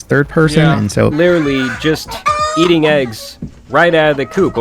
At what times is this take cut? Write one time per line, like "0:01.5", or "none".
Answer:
0:01.1